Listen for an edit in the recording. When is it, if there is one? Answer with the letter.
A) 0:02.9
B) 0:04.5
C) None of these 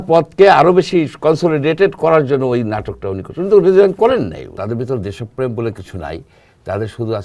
B